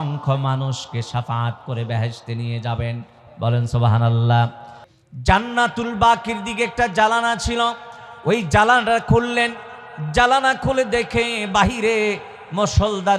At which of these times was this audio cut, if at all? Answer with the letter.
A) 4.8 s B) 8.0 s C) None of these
A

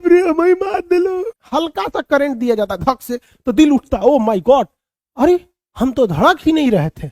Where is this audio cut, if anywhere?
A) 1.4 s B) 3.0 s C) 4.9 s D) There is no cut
A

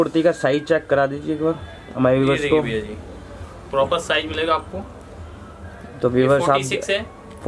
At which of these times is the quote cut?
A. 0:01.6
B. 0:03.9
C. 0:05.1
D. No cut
D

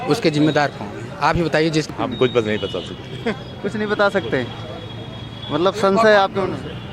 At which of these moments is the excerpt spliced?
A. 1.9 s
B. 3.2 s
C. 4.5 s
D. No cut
A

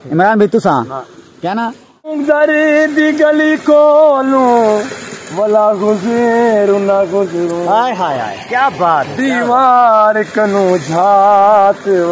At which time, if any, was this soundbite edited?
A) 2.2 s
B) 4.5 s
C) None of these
A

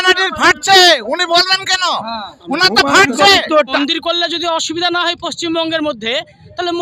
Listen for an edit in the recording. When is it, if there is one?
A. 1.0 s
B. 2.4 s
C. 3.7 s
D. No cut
C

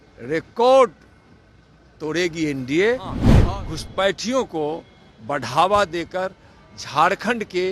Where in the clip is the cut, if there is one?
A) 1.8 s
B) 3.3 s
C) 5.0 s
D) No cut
B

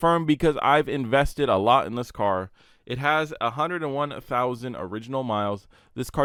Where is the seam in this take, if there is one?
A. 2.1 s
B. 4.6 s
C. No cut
C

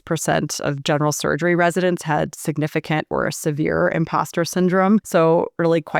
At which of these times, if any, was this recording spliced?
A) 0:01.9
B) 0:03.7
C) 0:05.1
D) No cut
C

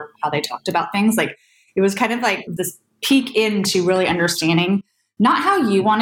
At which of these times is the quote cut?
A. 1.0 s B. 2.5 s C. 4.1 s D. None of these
B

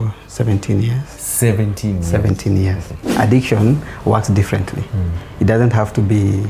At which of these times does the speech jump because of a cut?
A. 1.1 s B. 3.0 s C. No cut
B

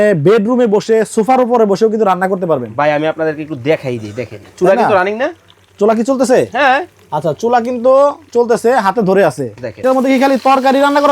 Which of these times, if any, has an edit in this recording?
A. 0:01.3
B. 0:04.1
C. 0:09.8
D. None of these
C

